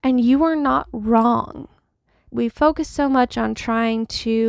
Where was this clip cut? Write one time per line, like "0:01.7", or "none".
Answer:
0:02.3